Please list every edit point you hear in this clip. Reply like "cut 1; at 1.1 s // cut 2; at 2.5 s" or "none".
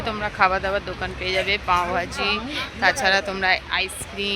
none